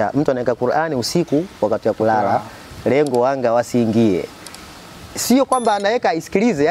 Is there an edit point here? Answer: no; 0 cuts

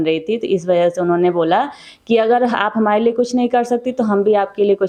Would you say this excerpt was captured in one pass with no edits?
yes; 0 cuts

